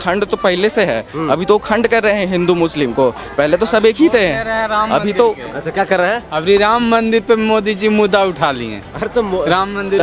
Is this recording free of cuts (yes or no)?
yes